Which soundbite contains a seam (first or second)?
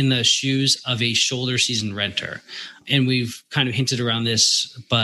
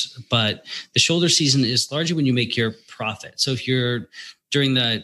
first